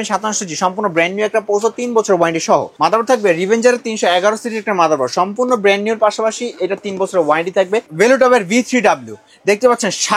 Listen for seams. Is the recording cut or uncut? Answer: cut